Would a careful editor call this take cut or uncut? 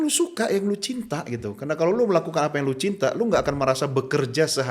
uncut